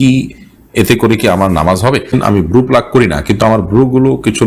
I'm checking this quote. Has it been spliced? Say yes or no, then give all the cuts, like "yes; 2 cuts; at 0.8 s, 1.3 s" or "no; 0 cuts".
yes; 1 cut; at 2.2 s